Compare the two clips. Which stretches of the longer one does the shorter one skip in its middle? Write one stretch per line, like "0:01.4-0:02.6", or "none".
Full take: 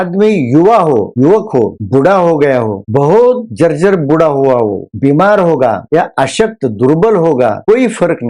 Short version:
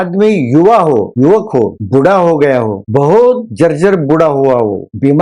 none